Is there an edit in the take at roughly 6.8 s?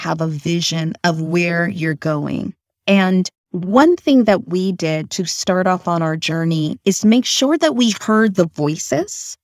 no; 1 cut; at 2.8 s

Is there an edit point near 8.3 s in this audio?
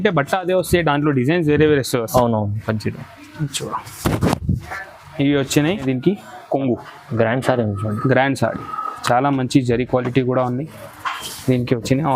no; 1 cut; at 5.8 s

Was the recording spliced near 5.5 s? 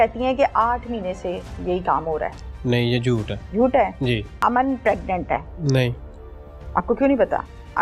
yes; 3 cuts; at 3.4 s, 4.3 s, 5.5 s

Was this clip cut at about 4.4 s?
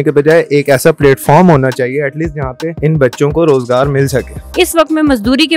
yes; 2 cuts; at 2.7 s, 4.4 s

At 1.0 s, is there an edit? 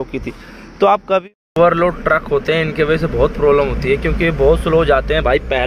yes; 1 cut; at 1.0 s

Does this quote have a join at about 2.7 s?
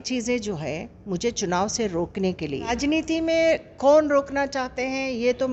yes; 1 cut; at 2.7 s

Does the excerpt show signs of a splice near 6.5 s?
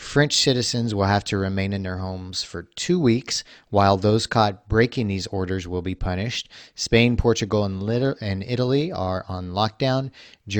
no; 0 cuts

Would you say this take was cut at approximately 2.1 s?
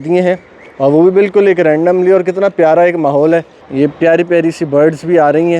no; 1 cut; at 3.6 s

